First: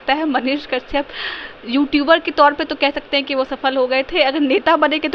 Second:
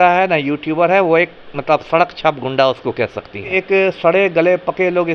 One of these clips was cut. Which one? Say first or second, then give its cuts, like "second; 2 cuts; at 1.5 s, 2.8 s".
second; 1 cut; at 3.5 s